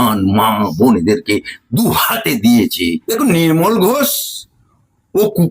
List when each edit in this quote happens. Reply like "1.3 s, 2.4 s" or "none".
2.9 s